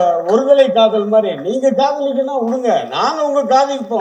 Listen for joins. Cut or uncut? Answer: uncut